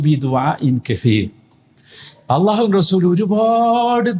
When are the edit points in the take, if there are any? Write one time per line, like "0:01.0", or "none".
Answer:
none